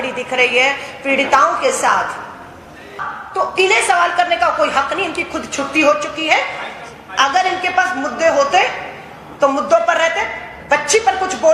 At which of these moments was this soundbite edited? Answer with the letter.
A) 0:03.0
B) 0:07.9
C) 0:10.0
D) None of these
A